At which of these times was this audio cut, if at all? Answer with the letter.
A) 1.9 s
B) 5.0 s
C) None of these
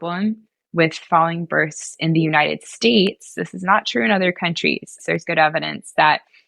B